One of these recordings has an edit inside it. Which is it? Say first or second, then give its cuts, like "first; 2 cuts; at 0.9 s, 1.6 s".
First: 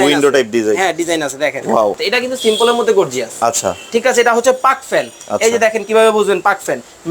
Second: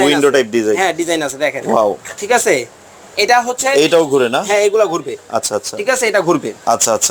first; 1 cut; at 2.0 s